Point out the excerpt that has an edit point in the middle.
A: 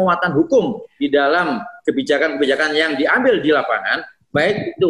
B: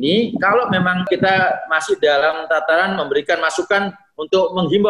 B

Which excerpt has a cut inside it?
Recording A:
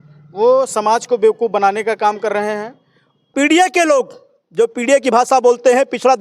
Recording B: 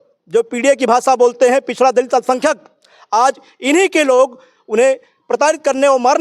A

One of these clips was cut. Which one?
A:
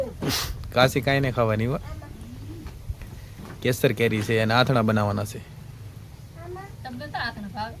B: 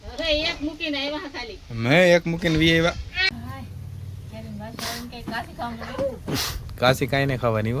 B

